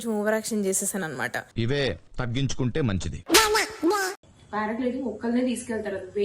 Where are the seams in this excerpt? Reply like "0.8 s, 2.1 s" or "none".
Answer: 4.2 s